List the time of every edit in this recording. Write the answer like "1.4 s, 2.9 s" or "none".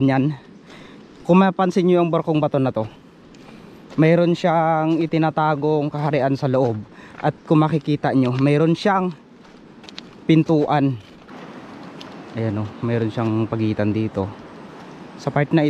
11.3 s